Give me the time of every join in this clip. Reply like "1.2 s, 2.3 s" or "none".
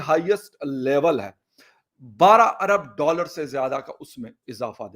1.6 s